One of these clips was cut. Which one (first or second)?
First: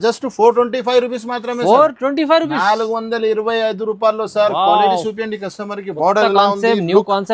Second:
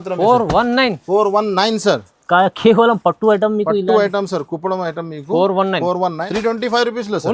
second